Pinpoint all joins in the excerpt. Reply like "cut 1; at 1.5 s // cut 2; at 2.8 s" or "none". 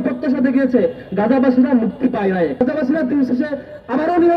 cut 1; at 2.6 s